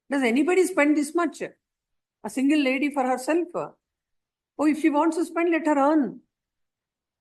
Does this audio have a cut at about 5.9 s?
no; 0 cuts

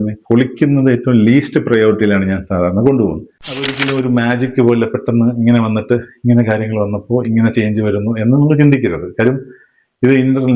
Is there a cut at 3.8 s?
yes; 1 cut; at 3.8 s

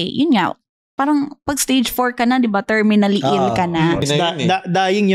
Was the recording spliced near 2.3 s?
no; 1 cut; at 4.0 s

